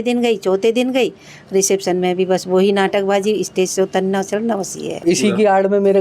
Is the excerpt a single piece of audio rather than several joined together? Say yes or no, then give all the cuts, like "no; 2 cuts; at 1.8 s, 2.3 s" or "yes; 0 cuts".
no; 1 cut; at 4.9 s